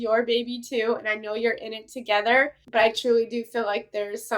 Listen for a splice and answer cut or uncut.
uncut